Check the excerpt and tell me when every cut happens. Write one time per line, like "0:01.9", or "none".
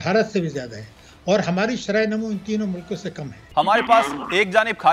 0:03.4